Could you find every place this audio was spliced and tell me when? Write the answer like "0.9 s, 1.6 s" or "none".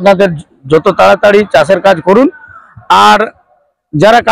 none